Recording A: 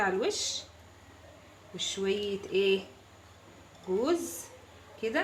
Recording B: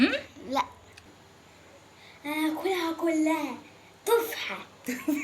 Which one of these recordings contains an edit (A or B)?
B